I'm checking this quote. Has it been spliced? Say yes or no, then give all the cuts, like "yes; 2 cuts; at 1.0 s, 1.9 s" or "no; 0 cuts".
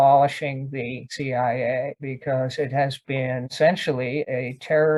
no; 0 cuts